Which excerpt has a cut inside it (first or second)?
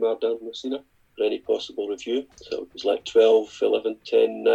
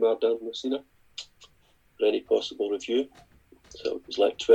first